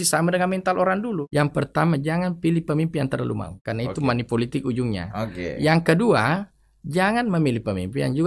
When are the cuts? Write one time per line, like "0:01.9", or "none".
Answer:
0:01.2
0:03.6